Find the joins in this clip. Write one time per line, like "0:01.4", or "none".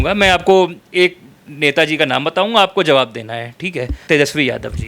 0:03.9